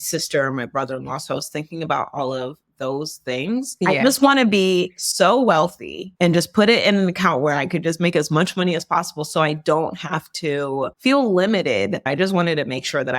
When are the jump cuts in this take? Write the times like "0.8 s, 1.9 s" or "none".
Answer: 3.7 s, 12.0 s